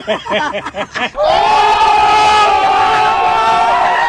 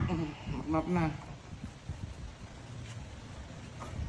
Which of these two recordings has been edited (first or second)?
first